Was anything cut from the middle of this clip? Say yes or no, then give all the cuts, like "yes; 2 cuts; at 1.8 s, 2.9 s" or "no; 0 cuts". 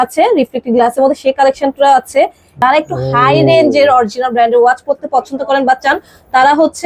yes; 1 cut; at 2.5 s